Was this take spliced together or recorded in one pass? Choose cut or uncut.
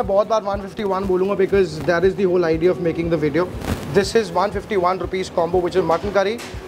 uncut